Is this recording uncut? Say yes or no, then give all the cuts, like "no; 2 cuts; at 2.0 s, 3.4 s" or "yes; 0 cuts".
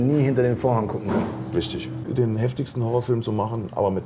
no; 1 cut; at 2.0 s